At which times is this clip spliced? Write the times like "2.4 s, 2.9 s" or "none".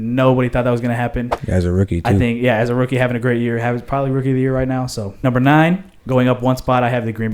5.0 s